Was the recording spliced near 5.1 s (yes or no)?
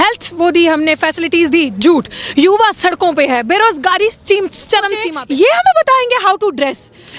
yes